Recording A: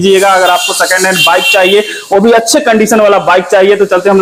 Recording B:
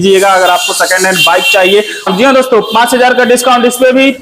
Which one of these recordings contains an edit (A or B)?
B